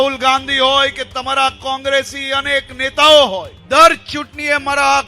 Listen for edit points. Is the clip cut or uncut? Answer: cut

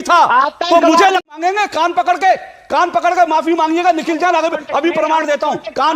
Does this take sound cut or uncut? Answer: cut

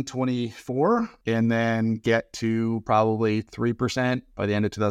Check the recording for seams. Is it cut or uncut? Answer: cut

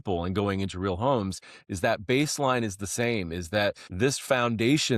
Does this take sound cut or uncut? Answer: cut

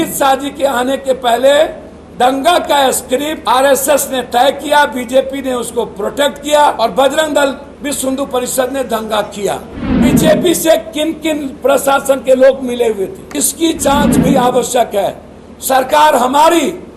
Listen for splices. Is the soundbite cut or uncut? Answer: cut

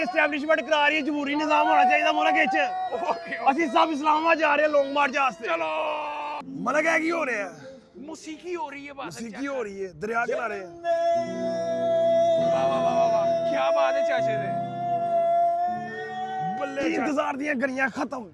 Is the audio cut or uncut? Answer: cut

